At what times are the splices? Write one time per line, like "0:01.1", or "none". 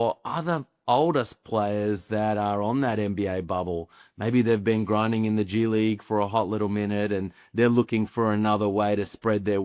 none

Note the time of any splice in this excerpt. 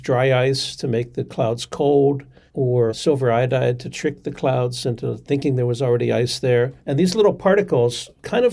0:02.9

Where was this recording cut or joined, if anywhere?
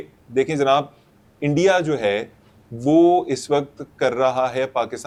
none

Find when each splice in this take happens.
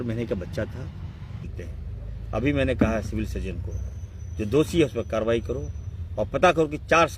0:01.5

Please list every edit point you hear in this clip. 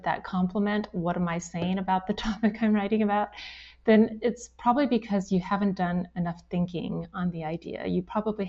none

